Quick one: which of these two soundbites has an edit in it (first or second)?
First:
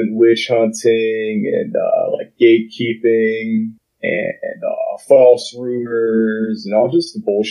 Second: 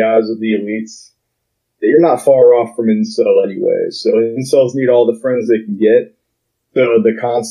first